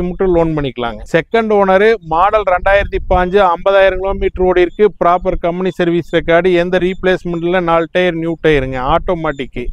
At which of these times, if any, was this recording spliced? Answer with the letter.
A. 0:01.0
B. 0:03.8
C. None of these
A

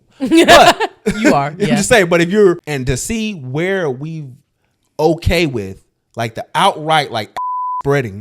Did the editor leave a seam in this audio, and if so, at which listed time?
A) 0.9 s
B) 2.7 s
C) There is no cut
B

